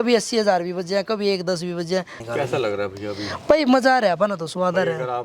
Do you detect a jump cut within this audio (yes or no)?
no